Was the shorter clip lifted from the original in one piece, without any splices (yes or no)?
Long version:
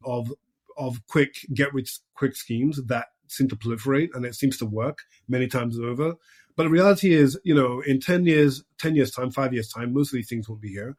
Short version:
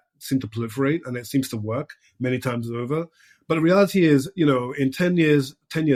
yes